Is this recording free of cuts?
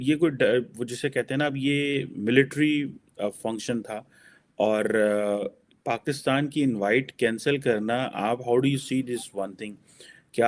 yes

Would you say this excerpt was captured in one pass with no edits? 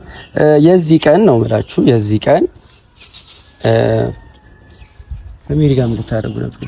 yes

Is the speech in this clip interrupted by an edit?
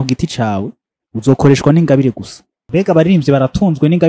yes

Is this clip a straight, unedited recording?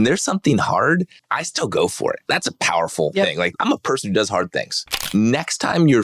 no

